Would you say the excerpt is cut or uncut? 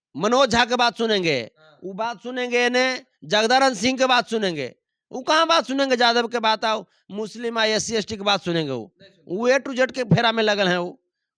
uncut